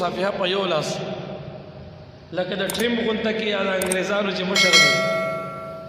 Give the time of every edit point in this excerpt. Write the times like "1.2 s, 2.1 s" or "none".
none